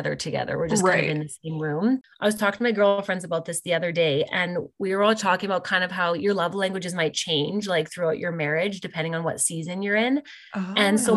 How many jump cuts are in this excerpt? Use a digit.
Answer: 1